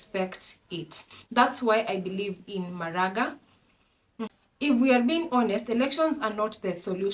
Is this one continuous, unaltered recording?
no; 1 cut; at 4.2 s

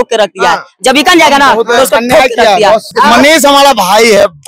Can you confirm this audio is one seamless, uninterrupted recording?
no; 1 cut; at 2.9 s

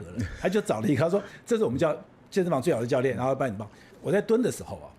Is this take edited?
yes; 1 cut; at 3.9 s

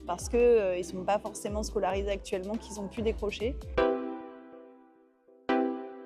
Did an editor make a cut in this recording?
yes; 1 cut; at 3.6 s

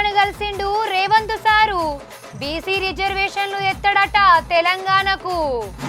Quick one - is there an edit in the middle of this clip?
no; 0 cuts

